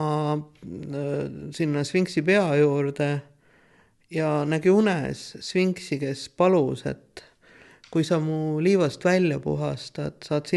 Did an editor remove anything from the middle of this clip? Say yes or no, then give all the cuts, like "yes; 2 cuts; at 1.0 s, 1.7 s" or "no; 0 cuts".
no; 0 cuts